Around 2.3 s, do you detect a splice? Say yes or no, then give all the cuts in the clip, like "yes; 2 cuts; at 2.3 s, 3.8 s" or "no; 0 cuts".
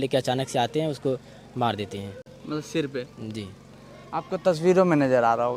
no; 0 cuts